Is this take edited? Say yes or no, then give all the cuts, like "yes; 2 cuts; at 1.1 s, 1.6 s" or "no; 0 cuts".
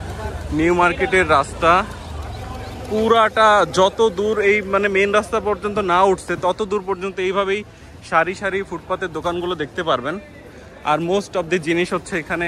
no; 0 cuts